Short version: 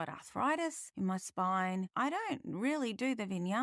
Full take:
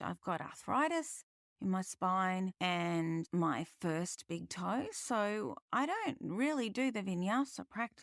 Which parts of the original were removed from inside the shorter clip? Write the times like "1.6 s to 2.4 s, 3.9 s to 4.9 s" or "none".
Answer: 1.2 s to 1.5 s, 2.5 s to 5.7 s